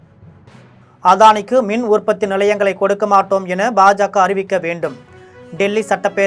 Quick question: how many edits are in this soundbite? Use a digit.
1